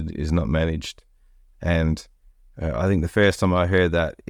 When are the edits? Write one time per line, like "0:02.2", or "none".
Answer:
none